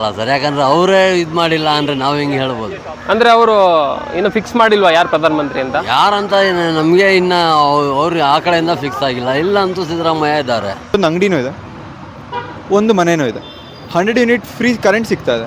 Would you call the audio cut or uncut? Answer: cut